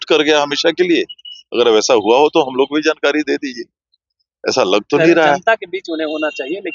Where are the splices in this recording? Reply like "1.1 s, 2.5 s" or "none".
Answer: none